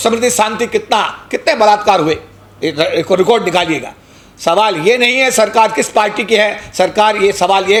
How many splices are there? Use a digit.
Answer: 0